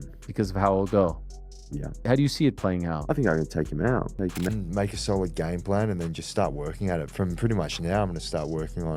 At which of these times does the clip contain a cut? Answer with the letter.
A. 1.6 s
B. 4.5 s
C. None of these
B